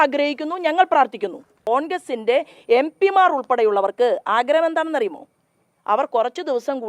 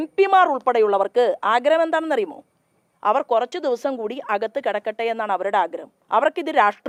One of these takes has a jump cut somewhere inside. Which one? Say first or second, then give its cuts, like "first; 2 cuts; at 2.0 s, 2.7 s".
first; 1 cut; at 1.7 s